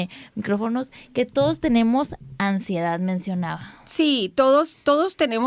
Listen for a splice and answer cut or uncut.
uncut